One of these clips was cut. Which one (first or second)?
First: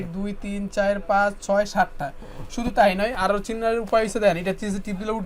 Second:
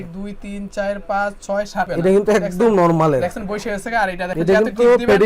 second